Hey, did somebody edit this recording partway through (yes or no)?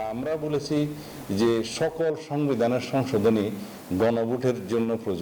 no